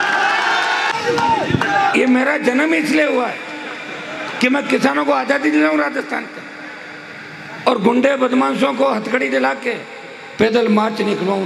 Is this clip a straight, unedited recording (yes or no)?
no